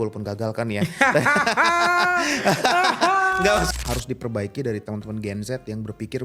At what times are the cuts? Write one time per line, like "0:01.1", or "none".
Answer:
0:03.7